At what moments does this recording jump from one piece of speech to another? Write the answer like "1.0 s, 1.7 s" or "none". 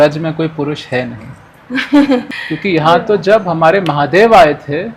2.3 s